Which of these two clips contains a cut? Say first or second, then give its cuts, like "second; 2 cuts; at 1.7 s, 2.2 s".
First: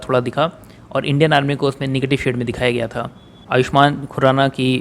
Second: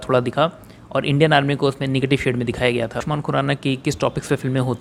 first; 1 cut; at 3.0 s